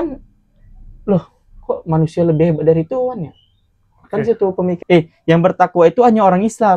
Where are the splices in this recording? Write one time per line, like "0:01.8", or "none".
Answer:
0:04.8